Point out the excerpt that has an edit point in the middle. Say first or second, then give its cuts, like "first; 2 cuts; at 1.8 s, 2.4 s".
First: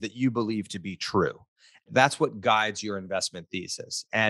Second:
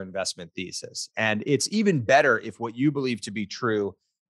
first; 1 cut; at 1.9 s